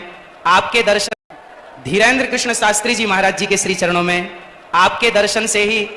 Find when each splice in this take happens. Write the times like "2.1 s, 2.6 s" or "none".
1.0 s